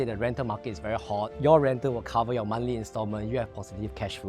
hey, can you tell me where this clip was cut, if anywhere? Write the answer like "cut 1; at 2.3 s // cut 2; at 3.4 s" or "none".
cut 1; at 1.3 s

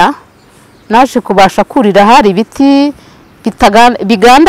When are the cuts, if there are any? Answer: none

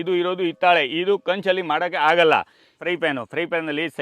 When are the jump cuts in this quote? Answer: cut 1; at 2.8 s

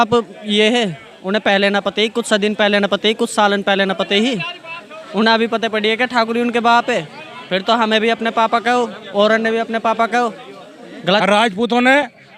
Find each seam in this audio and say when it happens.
cut 1; at 11.2 s

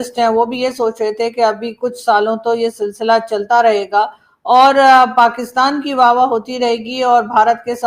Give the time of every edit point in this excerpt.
none

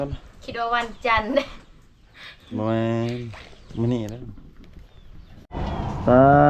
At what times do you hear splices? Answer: cut 1; at 5.4 s

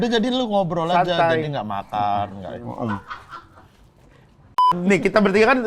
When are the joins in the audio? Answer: cut 1; at 4.7 s

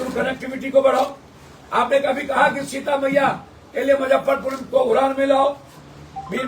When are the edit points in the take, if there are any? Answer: none

